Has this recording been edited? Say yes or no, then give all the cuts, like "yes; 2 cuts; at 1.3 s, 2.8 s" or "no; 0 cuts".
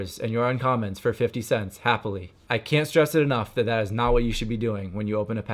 yes; 1 cut; at 2.3 s